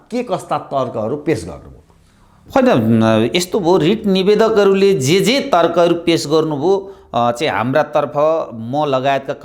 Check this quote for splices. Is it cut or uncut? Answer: uncut